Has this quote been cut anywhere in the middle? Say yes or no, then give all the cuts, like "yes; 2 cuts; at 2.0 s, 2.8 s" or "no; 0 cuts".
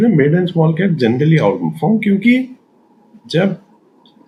no; 0 cuts